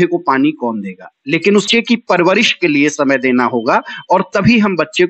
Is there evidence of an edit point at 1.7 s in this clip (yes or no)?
yes